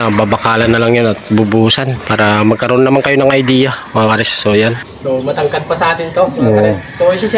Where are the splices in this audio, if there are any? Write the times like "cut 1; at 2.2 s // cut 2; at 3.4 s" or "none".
cut 1; at 4.8 s